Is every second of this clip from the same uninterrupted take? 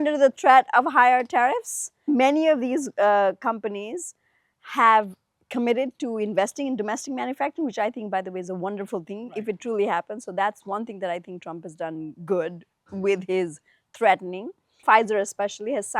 no; 2 cuts; at 2.1 s, 14.8 s

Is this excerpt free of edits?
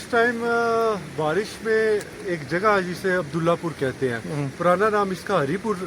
yes; 0 cuts

